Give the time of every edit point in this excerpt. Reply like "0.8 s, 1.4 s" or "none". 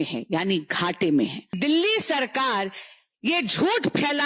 1.5 s